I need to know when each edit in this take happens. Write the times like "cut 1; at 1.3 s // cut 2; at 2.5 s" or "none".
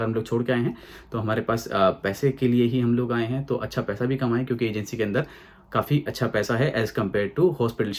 none